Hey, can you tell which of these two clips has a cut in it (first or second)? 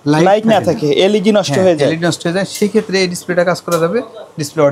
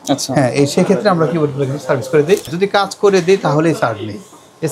second